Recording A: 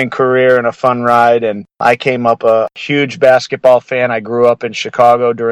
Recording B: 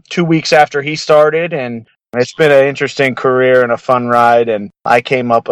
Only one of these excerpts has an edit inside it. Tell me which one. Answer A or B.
B